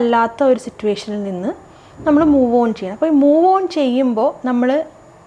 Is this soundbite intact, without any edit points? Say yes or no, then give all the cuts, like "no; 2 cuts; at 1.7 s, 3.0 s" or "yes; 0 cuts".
yes; 0 cuts